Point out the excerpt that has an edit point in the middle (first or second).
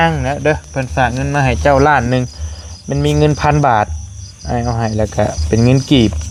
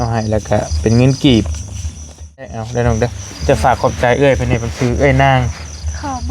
second